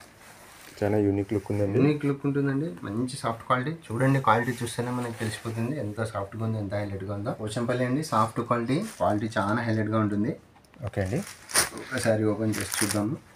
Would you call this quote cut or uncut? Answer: cut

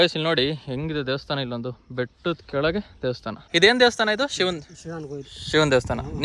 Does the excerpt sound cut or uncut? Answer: uncut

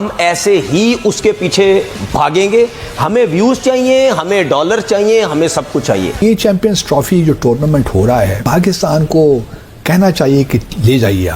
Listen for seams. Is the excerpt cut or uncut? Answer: cut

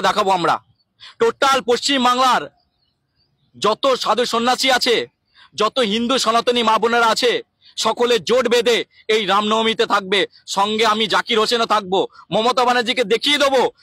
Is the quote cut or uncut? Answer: uncut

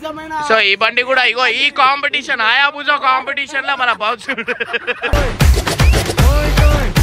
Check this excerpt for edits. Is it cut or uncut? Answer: uncut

